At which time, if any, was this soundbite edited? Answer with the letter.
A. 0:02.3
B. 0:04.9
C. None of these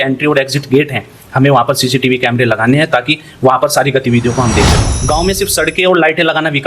B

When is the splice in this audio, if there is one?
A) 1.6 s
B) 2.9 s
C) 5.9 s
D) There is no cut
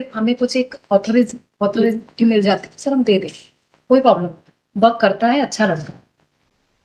D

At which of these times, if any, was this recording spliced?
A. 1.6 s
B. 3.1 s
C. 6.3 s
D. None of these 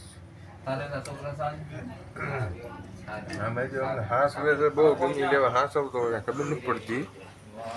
D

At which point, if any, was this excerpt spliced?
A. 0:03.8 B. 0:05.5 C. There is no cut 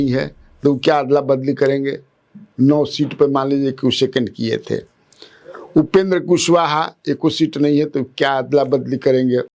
C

